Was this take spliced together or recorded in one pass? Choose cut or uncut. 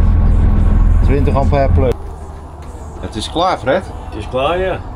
cut